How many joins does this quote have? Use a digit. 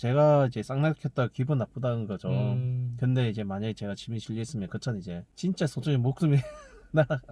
0